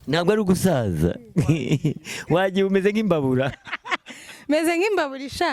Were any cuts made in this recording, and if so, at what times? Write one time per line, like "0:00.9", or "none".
none